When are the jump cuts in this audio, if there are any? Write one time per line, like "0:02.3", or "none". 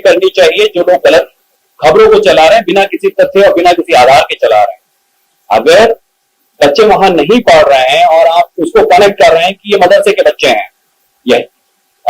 none